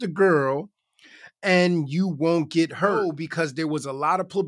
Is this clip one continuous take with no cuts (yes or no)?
no